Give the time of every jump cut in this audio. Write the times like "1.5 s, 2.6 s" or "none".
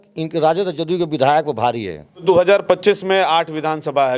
2.2 s